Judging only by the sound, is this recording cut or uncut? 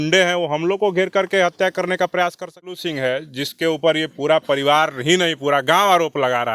cut